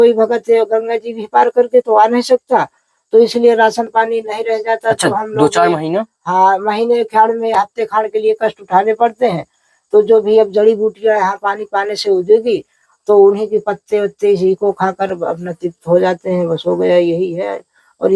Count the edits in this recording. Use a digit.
0